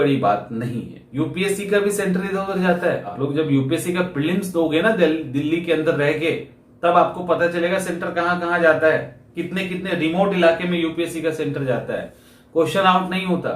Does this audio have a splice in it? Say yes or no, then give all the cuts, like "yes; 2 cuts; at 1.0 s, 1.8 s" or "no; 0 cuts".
yes; 2 cuts; at 1.0 s, 3.1 s